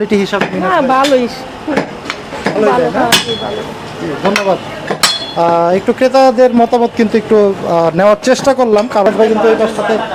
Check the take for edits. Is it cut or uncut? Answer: uncut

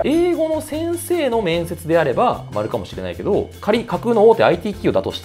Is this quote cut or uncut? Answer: uncut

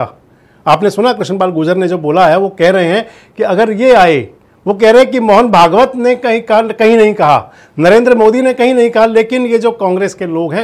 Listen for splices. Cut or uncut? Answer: uncut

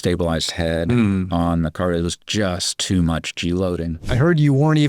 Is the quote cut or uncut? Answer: cut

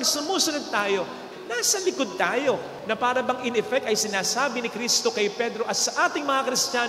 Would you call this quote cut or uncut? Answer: cut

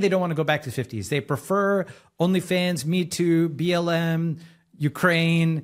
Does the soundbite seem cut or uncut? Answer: uncut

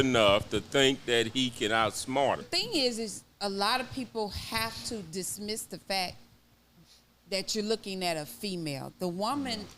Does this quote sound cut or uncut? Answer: cut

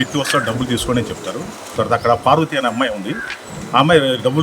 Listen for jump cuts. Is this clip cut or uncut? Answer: cut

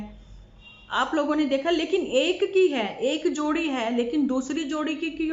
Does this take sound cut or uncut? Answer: uncut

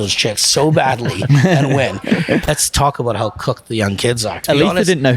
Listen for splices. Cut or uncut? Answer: cut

